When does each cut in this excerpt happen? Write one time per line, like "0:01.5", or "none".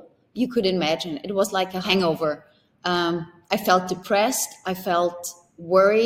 0:01.9